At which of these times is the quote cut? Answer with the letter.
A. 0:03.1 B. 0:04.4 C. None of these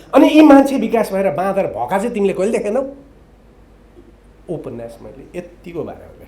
C